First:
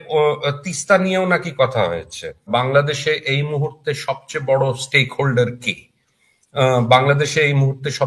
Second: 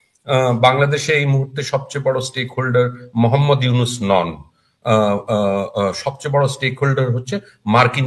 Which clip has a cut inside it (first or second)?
first